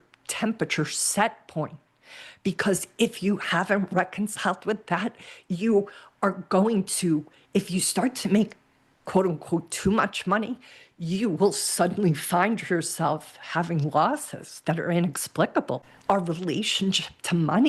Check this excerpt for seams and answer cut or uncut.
cut